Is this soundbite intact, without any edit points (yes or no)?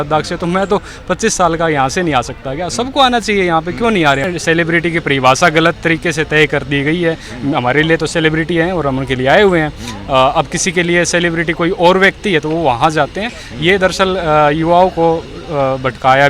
no